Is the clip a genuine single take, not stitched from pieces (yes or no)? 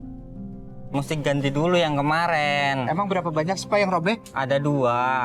no